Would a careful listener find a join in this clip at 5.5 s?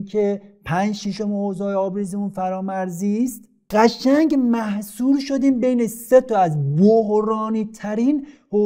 no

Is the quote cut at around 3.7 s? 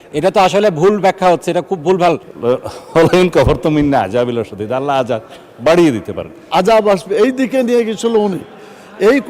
no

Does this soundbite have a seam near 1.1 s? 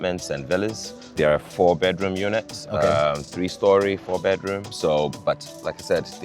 yes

